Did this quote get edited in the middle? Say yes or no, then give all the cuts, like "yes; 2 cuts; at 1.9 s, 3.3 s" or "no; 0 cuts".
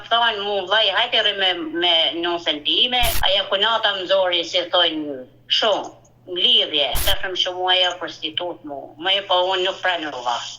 yes; 2 cuts; at 3.1 s, 7.0 s